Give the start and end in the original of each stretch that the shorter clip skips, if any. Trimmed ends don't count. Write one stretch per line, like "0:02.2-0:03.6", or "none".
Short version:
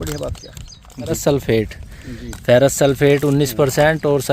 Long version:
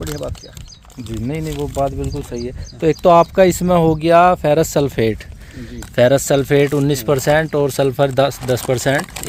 0:01.2-0:04.7

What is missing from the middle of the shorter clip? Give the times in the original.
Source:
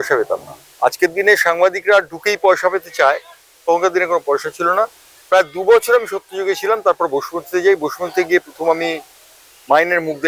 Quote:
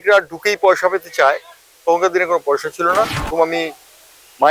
0:05.0-0:08.5

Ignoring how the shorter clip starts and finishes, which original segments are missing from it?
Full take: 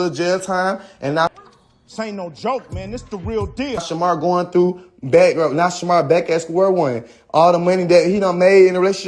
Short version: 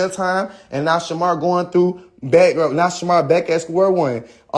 0:01.4-0:03.9

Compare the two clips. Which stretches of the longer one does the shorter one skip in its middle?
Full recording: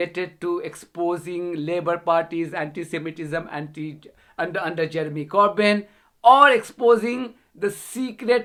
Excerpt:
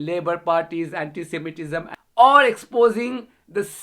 0:03.6-0:06.0

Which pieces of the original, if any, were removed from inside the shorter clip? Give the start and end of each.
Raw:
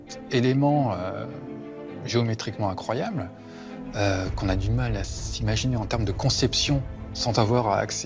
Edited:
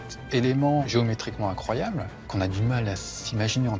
0:00.8-0:02.0
0:03.5-0:04.3

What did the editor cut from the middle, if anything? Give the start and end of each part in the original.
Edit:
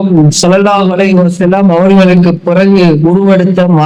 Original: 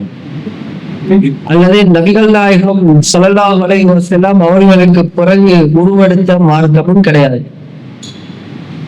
none

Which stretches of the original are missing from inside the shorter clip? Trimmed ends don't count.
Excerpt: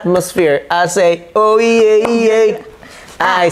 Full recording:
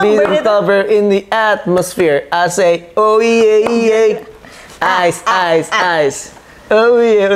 none

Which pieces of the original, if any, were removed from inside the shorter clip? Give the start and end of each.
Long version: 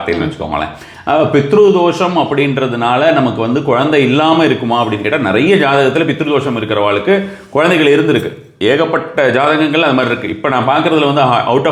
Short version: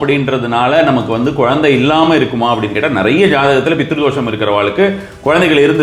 none

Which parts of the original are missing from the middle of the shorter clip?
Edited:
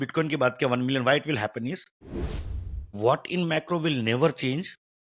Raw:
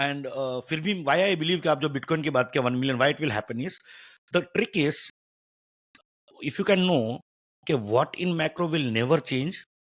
0:04.2-0:07.2

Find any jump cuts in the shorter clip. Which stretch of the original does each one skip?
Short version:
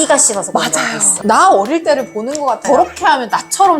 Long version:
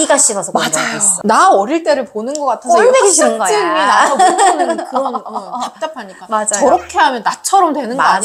0:02.6-0:06.5

